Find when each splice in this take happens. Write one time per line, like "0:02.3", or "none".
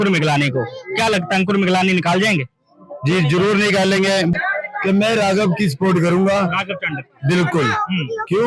0:04.3